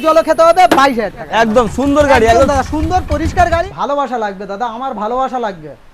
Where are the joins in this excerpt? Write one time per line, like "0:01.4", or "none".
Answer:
0:01.2
0:03.6